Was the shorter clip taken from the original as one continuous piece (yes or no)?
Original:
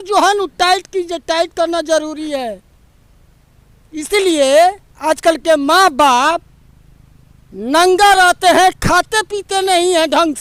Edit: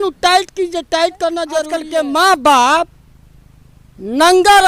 no